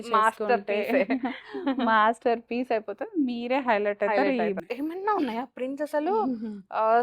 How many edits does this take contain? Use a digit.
1